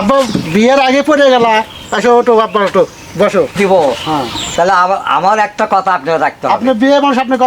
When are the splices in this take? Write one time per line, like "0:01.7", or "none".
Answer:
0:03.7